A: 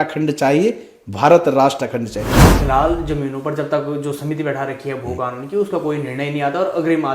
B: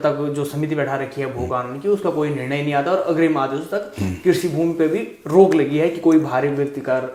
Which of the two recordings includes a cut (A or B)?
A